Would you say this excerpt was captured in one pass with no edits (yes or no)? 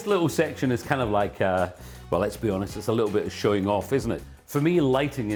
yes